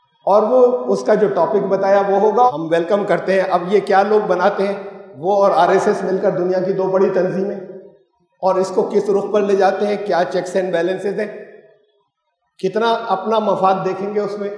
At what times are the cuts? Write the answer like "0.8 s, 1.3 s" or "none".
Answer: 2.5 s